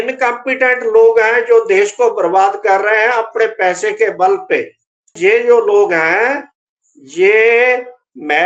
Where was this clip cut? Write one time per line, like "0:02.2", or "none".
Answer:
0:05.2